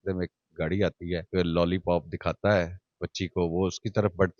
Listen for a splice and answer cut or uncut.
cut